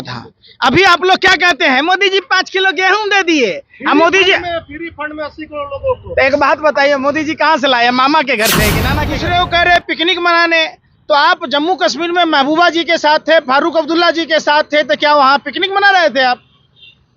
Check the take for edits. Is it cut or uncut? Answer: cut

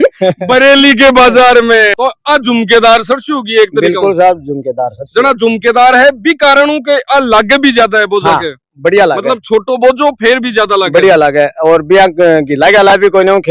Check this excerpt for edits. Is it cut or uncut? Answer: uncut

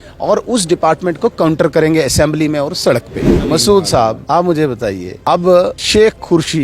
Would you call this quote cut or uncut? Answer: cut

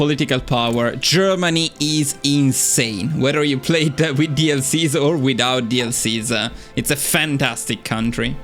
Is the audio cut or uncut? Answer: uncut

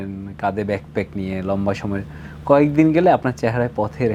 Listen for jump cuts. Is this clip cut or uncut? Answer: uncut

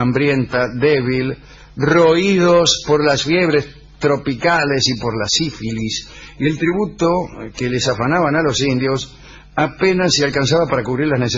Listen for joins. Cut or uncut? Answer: uncut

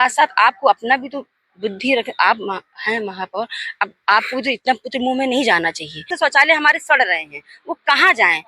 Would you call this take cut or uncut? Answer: cut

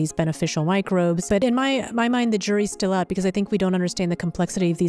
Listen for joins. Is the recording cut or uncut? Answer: cut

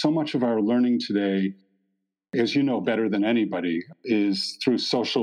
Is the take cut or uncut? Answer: cut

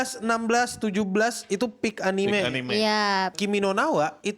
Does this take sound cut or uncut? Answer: cut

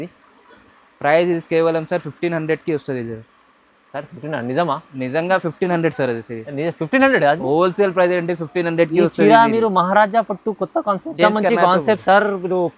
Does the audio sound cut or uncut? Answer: uncut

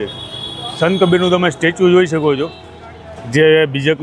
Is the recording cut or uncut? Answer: uncut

